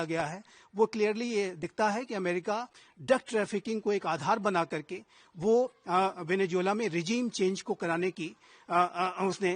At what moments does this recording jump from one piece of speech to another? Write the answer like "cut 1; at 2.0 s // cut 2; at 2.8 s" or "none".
none

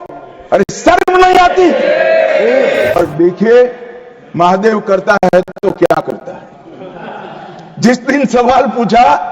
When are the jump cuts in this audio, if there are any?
cut 1; at 2.9 s

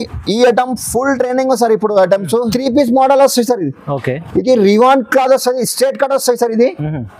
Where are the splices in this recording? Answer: cut 1; at 2.5 s

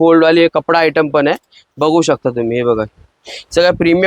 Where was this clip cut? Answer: none

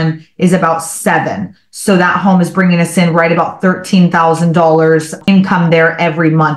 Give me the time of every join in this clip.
cut 1; at 5.3 s

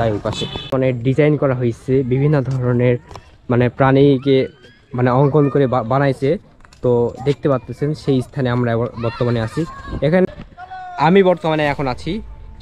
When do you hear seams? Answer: cut 1; at 0.7 s // cut 2; at 10.2 s

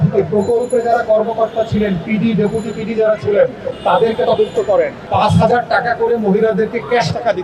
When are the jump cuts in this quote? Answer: cut 1; at 5.0 s

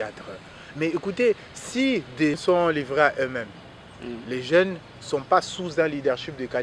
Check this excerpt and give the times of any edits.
cut 1; at 2.4 s

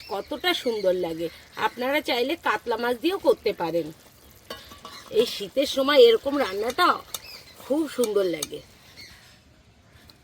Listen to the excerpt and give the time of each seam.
cut 1; at 8.9 s

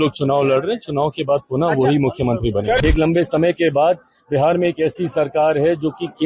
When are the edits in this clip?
cut 1; at 2.8 s

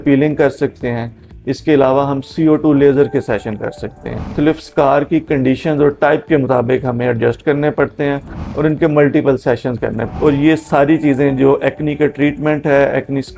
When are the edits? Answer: cut 1; at 4.3 s // cut 2; at 10.1 s

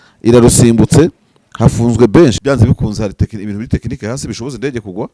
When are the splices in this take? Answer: cut 1; at 2.4 s

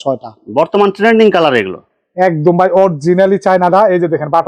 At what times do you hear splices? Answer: none

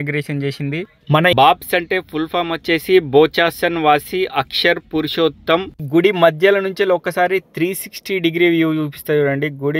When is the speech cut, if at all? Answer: cut 1; at 1.3 s // cut 2; at 5.8 s

